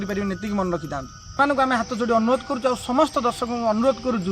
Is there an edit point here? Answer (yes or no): yes